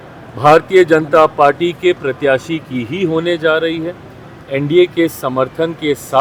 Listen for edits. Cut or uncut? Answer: uncut